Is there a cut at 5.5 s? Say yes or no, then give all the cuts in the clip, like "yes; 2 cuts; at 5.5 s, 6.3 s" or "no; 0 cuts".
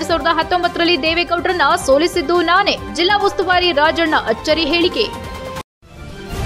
yes; 1 cut; at 5.5 s